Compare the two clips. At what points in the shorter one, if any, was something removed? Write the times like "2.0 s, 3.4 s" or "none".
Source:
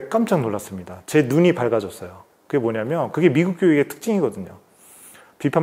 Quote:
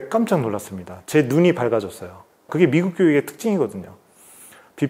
2.4 s